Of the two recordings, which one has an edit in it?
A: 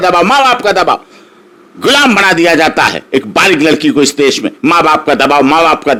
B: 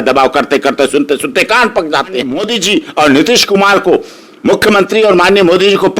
B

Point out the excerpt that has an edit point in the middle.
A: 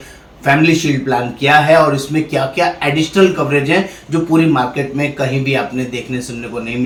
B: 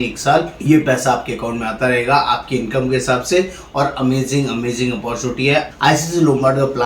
B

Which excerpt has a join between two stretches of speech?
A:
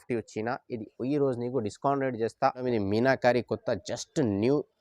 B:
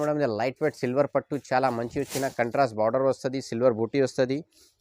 A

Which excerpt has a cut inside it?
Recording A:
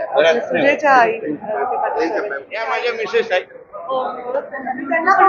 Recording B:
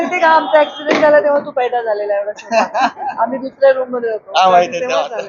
A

